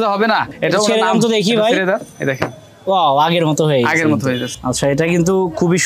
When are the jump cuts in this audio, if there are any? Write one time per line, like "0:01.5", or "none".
0:04.5